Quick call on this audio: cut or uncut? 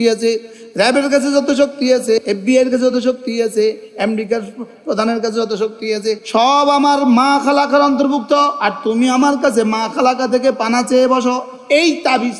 cut